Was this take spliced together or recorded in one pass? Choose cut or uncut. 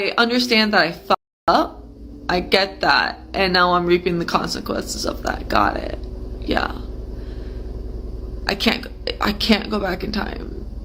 uncut